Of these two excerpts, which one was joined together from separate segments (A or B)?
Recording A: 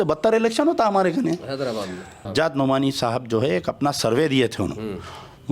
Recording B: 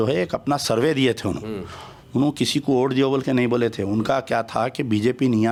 A